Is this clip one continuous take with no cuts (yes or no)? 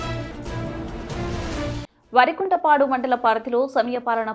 no